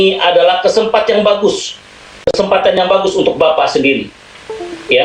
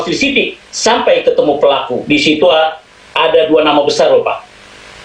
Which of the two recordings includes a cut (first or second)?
second